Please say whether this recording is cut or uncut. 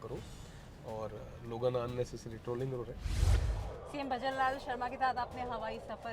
cut